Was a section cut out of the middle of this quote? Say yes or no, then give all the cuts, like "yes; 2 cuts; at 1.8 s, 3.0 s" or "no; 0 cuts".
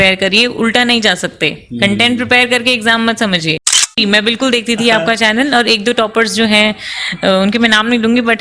yes; 1 cut; at 4.0 s